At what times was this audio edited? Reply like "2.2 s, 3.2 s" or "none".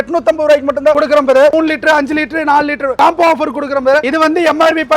1.5 s, 2.9 s, 4.1 s